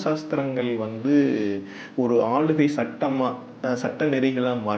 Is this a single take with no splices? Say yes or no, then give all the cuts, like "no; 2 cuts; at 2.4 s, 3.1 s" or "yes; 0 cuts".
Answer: yes; 0 cuts